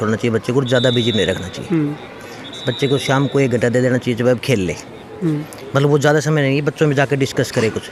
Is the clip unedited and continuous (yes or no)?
yes